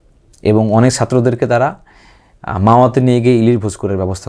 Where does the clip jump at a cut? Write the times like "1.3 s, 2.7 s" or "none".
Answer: none